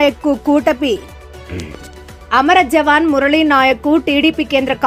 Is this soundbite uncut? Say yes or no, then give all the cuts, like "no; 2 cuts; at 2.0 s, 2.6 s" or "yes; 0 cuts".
yes; 0 cuts